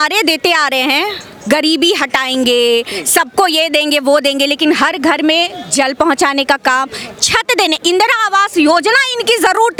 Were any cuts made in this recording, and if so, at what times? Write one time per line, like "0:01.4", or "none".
none